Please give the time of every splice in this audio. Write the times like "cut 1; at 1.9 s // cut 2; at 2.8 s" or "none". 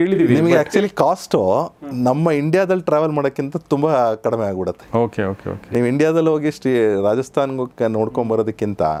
none